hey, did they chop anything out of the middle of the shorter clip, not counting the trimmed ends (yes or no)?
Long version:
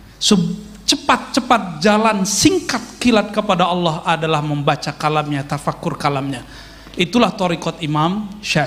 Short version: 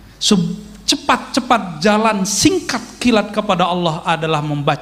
no